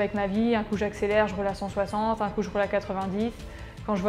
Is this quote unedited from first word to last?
yes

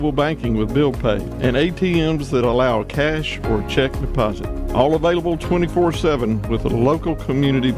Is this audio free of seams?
yes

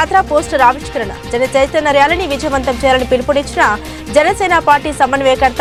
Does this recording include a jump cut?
no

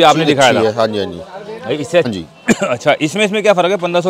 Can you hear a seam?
yes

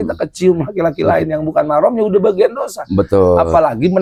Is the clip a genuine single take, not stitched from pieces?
yes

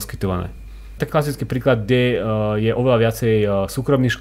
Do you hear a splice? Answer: yes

